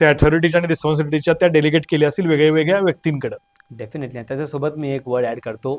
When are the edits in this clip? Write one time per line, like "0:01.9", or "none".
none